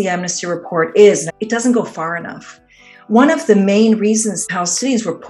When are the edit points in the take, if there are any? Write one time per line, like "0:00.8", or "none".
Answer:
0:01.2
0:04.4